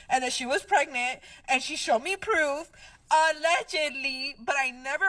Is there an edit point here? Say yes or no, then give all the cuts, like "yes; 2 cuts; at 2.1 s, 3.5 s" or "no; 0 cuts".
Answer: no; 0 cuts